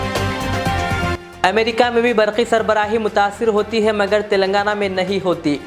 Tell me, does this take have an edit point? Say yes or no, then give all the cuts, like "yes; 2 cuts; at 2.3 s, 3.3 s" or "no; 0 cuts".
yes; 1 cut; at 1.1 s